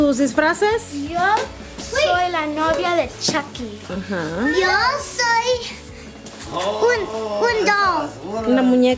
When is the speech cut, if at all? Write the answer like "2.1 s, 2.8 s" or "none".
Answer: none

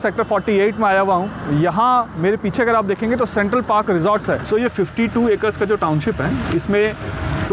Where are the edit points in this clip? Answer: 4.4 s

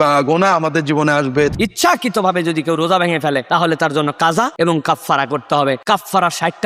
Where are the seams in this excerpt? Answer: 1.5 s, 4.5 s, 5.8 s

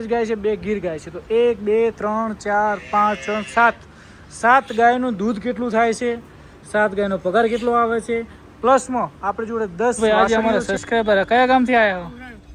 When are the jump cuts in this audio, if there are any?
10.0 s

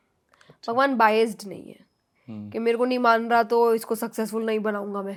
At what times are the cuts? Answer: none

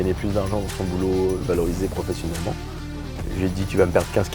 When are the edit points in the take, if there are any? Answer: none

